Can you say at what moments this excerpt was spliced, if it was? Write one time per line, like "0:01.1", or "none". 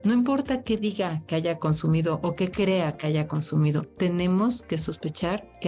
none